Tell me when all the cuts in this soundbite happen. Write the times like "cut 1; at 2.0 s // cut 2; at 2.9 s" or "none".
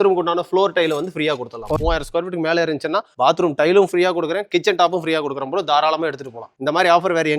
cut 1; at 1.7 s